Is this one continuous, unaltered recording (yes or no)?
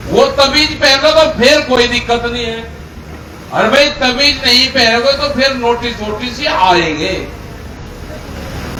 yes